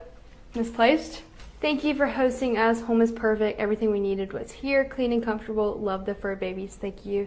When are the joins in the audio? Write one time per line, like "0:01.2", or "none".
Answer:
0:01.3